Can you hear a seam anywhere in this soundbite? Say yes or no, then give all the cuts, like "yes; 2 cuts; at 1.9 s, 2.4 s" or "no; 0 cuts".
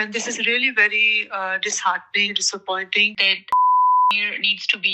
yes; 2 cuts; at 2.3 s, 3.2 s